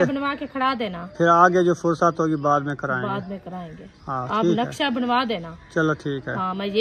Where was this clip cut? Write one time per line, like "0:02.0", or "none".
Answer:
none